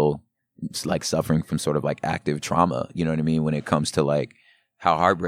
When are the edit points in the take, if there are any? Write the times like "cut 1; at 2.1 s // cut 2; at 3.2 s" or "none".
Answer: none